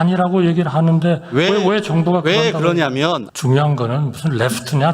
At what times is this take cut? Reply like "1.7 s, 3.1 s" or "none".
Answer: 3.3 s